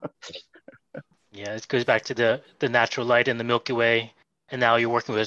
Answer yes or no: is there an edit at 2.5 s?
no